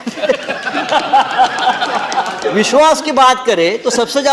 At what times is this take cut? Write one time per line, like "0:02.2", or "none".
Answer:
0:02.4